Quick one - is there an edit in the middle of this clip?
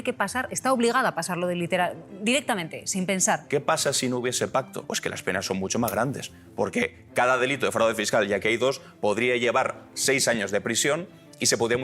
yes; 2 cuts; at 3.4 s, 4.8 s

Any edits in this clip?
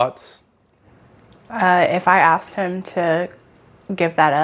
no; 0 cuts

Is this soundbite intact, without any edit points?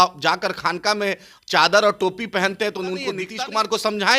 no; 1 cut; at 3.2 s

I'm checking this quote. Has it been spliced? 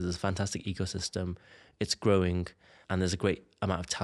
yes; 1 cut; at 2.8 s

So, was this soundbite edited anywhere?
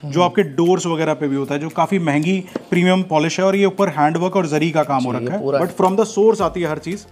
yes; 1 cut; at 5.6 s

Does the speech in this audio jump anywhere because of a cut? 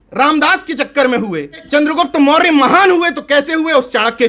yes; 1 cut; at 1.6 s

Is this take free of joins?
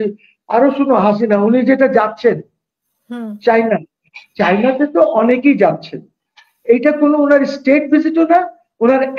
yes; 0 cuts

